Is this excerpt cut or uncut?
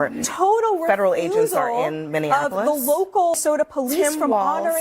cut